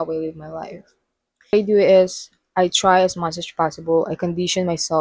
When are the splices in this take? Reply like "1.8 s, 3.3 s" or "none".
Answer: 1.5 s